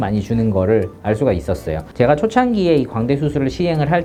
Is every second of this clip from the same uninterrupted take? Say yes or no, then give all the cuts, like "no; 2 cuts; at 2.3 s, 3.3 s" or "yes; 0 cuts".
yes; 0 cuts